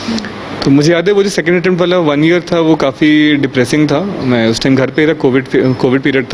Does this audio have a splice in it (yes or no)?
no